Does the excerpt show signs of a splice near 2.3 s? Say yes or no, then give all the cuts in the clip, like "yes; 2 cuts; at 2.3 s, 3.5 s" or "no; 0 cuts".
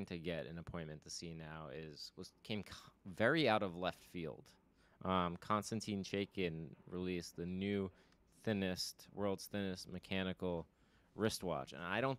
no; 0 cuts